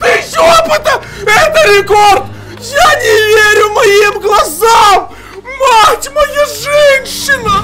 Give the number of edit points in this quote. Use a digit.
0